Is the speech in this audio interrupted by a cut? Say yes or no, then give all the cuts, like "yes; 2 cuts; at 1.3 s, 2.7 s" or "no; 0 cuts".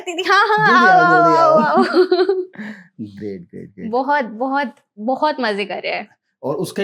no; 0 cuts